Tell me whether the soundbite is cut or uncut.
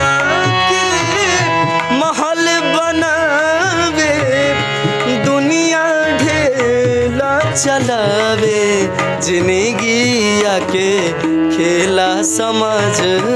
uncut